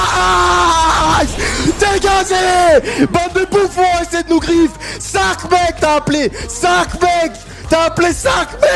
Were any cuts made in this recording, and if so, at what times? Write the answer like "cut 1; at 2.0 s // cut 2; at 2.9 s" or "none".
none